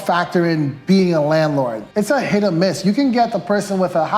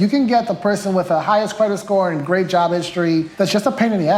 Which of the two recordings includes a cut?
first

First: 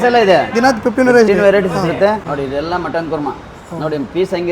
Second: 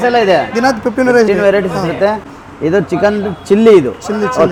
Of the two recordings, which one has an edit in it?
first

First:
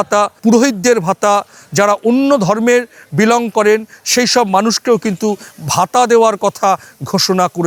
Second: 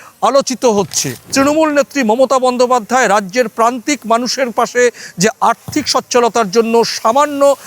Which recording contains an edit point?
second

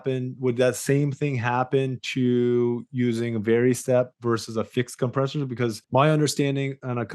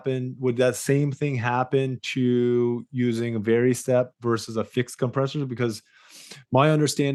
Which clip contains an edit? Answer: first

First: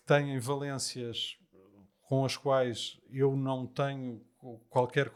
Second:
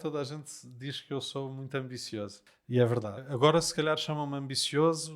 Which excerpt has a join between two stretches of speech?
second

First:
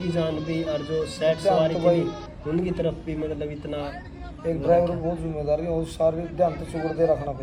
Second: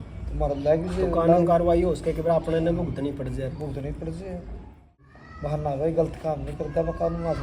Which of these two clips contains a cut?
second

